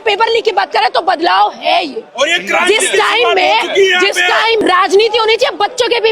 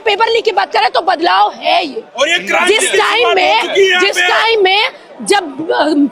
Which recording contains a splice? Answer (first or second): first